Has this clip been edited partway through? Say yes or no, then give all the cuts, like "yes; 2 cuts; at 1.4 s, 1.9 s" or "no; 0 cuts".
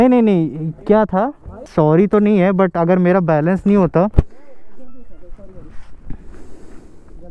yes; 1 cut; at 1.7 s